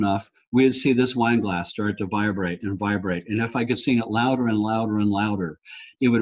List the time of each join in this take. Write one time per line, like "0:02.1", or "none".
none